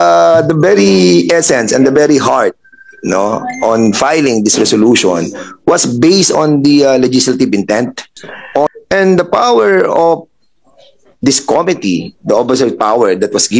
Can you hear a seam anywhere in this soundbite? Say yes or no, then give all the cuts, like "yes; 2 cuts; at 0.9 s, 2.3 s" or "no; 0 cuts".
yes; 1 cut; at 8.7 s